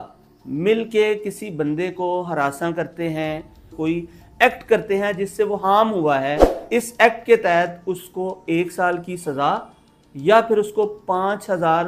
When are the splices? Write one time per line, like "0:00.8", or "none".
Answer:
0:03.7
0:06.5